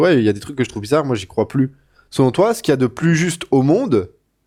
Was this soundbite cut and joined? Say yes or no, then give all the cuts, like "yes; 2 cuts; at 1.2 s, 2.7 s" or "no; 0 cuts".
no; 0 cuts